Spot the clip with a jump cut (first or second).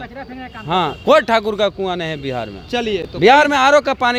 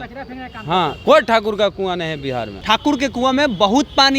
second